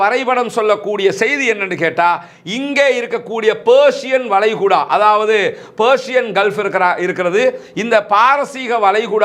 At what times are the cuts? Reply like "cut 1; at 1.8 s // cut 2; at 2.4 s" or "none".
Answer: none